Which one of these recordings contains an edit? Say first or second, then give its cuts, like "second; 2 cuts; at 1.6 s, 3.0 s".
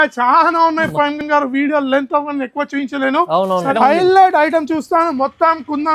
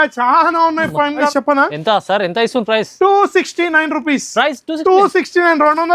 second; 1 cut; at 1.2 s